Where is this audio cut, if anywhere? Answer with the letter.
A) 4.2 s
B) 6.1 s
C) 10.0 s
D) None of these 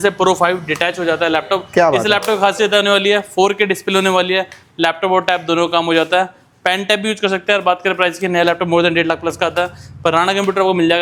D